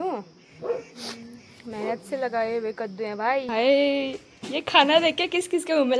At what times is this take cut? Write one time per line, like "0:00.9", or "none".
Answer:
0:03.5